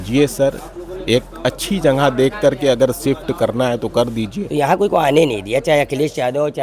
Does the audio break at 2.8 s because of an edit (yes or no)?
no